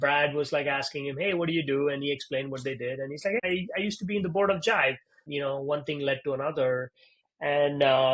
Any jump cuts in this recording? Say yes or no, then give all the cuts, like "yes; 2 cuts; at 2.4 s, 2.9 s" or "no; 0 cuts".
yes; 2 cuts; at 3.4 s, 5.2 s